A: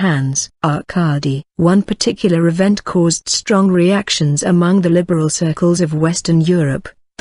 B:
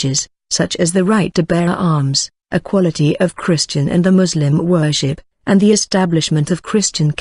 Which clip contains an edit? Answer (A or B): A